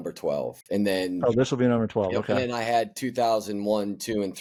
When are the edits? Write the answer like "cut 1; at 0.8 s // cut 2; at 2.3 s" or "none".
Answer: none